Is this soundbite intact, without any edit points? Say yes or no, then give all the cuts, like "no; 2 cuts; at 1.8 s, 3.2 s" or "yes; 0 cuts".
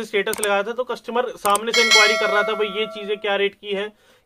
yes; 0 cuts